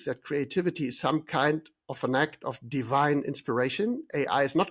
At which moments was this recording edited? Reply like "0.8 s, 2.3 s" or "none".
none